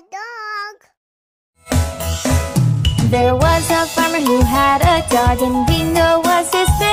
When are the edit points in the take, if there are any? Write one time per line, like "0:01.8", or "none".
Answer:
none